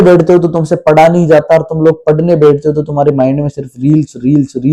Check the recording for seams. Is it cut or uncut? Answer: uncut